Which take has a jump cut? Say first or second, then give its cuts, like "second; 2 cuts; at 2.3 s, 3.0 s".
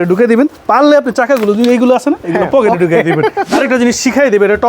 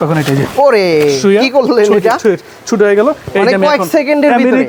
first; 1 cut; at 3.4 s